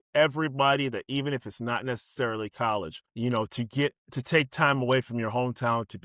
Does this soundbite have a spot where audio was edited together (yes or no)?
yes